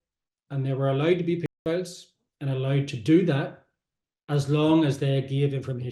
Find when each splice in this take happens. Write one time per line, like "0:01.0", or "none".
none